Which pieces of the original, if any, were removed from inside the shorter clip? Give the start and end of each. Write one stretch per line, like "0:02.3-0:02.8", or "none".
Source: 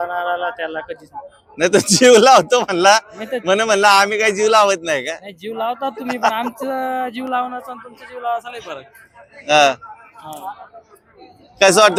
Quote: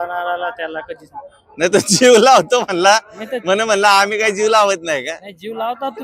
none